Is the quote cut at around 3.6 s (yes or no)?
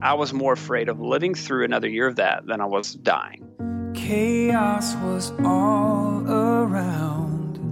yes